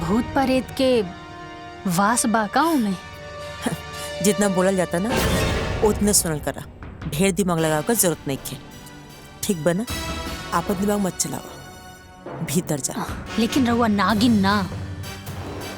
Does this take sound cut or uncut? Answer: cut